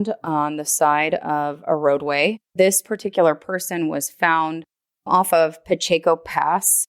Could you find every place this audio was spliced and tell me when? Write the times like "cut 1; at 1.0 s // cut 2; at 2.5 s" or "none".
cut 1; at 2.4 s